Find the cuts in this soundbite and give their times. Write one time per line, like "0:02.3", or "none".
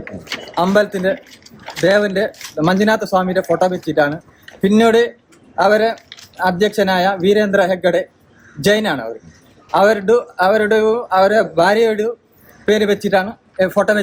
none